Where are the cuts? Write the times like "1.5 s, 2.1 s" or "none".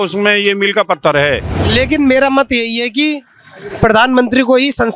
1.6 s